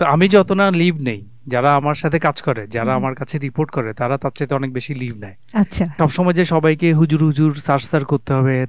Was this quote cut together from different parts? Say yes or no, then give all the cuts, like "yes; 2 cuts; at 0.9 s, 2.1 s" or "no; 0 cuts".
yes; 1 cut; at 6.0 s